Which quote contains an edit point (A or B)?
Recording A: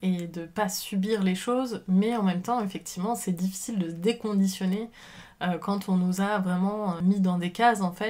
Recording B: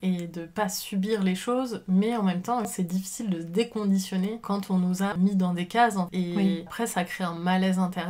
B